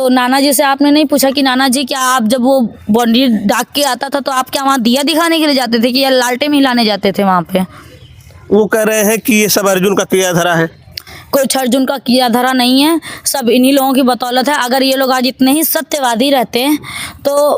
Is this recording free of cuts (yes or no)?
yes